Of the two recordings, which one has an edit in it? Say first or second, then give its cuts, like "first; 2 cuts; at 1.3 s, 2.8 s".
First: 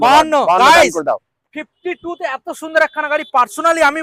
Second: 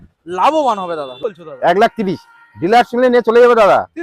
second; 1 cut; at 1.1 s